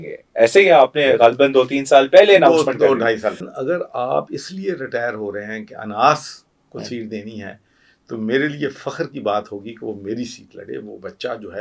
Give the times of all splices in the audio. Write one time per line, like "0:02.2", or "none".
0:03.4